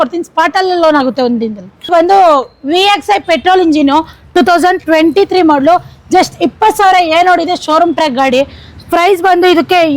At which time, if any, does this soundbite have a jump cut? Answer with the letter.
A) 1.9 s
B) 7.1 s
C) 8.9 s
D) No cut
A